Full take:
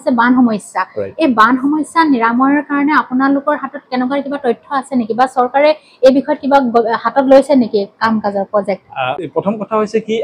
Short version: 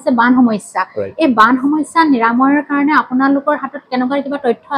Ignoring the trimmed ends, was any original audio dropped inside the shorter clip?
no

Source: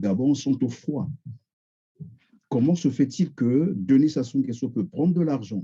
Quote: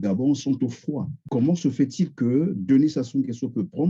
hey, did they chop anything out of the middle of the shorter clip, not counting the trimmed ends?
yes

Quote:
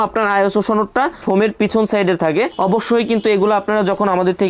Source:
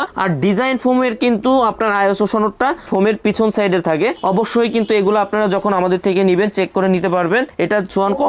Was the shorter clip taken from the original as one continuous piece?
yes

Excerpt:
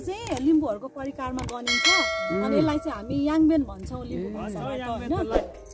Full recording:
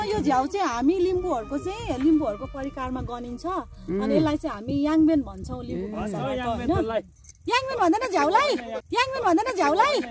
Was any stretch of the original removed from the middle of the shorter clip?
no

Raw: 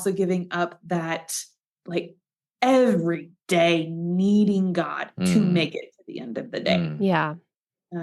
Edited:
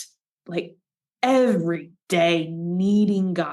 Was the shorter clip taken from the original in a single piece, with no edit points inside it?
yes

